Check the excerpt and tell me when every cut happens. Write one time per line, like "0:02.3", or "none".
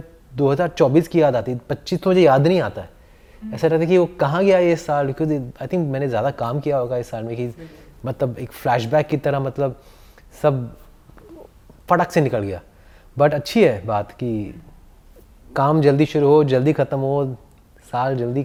none